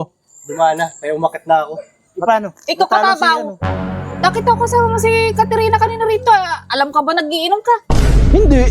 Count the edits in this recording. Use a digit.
1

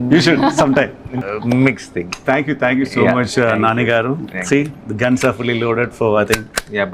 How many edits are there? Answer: 1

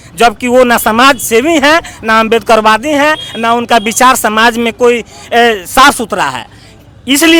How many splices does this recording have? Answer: 0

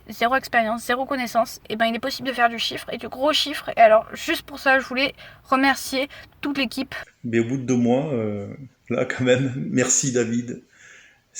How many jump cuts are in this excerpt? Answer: 1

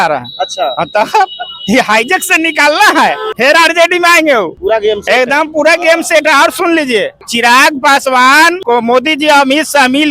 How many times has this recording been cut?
4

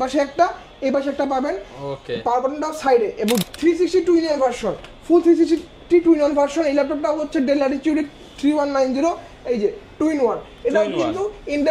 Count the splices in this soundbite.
1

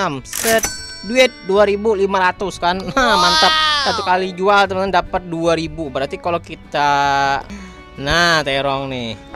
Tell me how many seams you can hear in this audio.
1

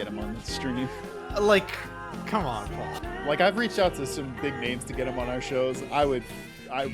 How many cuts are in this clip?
1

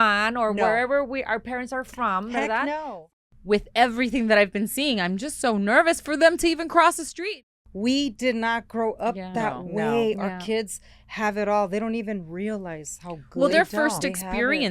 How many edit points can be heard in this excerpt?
2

